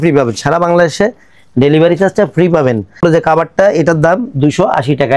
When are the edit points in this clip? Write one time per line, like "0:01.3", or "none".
0:03.0